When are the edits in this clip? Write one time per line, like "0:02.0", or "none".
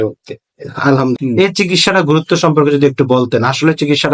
0:01.2